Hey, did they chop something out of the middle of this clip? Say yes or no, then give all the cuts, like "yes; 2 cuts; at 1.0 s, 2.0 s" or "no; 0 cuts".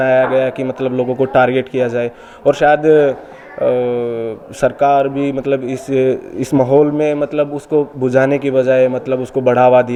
no; 0 cuts